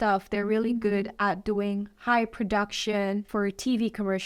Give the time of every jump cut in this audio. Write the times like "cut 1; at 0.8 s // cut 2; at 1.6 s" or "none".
cut 1; at 3.3 s